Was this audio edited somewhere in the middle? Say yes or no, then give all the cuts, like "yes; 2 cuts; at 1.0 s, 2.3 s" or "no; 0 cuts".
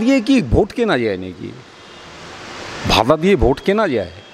no; 0 cuts